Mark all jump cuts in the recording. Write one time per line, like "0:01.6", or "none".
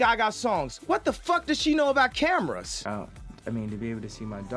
0:02.7